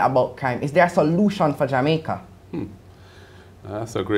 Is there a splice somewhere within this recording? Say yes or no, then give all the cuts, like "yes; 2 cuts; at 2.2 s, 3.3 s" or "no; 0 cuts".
yes; 1 cut; at 2.3 s